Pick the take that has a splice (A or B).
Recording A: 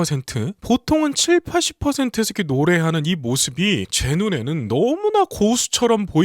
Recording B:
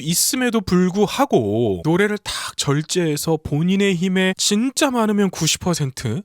A